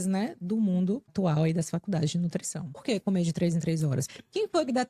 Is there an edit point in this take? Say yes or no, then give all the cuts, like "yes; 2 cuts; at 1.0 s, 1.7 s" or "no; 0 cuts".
yes; 3 cuts; at 1.1 s, 2.8 s, 4.0 s